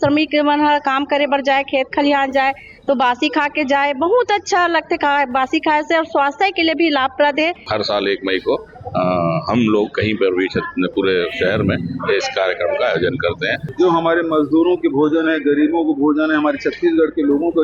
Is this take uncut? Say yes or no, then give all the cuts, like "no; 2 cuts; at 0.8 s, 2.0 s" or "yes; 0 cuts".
no; 2 cuts; at 7.6 s, 13.6 s